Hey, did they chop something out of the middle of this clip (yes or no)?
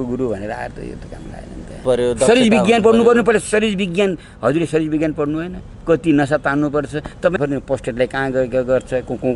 yes